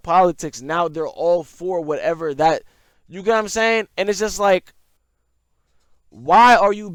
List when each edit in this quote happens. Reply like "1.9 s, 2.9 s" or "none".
none